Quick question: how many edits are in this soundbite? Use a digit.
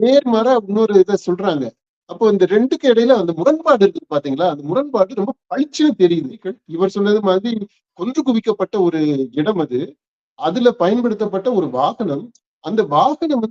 1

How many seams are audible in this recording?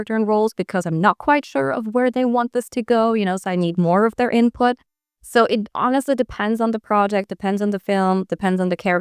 0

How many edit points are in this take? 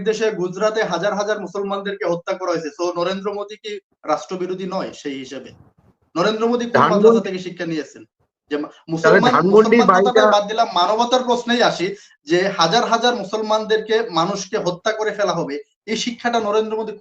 0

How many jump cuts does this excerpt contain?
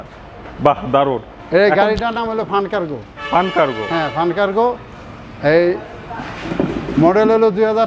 1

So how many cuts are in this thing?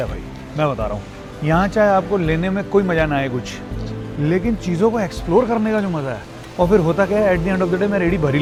0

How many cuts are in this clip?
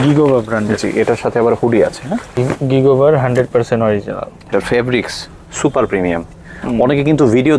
2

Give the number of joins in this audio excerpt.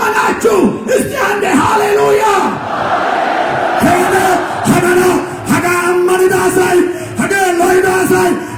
0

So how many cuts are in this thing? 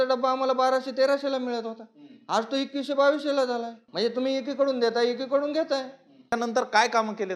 2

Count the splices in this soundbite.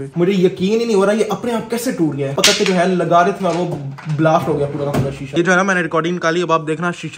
1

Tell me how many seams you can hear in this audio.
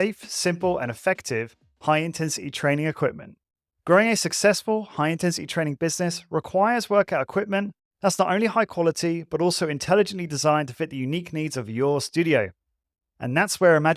0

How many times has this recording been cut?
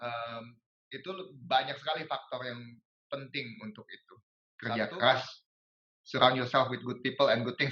1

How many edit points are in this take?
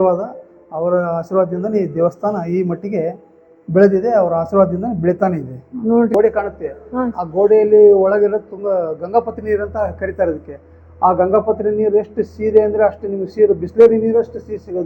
1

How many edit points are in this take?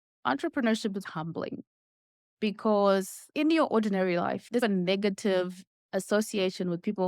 2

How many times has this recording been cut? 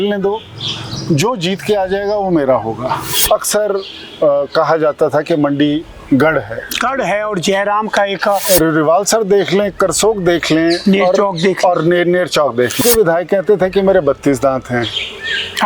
3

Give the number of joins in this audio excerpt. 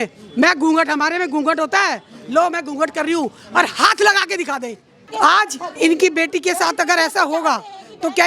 1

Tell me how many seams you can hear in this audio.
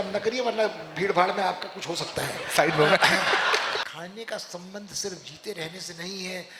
1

